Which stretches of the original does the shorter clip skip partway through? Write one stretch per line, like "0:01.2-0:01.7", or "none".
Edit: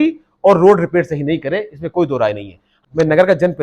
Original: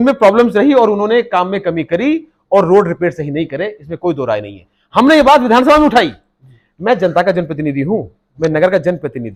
0:04.8-0:08.1